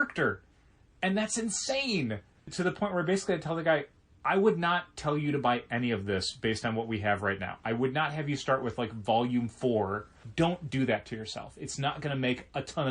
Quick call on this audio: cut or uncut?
cut